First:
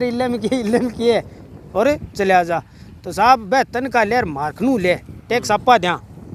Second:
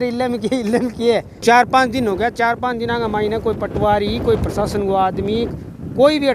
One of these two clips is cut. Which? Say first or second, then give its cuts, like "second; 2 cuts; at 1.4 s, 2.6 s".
second; 1 cut; at 1.3 s